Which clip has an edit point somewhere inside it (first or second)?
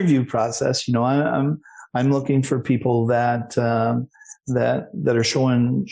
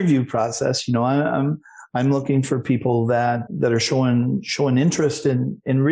second